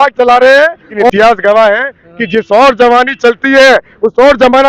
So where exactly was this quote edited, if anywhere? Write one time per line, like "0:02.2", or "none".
0:01.1